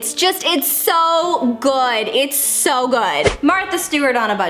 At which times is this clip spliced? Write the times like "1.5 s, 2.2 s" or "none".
3.3 s